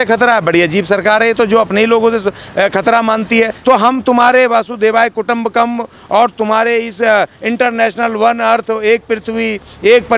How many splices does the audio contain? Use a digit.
1